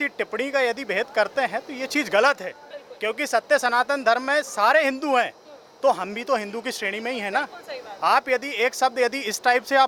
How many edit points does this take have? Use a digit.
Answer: 0